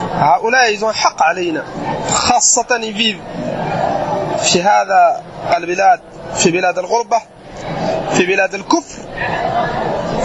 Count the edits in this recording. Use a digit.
0